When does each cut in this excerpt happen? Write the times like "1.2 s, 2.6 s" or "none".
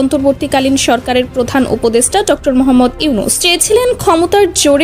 3.4 s